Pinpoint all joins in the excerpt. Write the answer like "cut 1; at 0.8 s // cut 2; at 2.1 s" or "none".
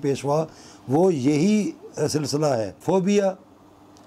cut 1; at 2.8 s